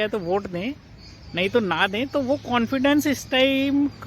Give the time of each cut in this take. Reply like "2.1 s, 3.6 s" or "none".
none